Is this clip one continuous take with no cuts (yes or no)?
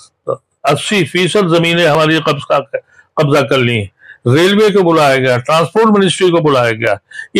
yes